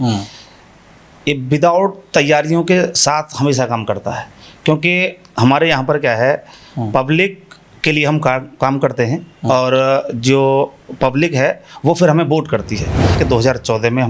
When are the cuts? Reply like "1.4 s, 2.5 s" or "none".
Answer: 13.2 s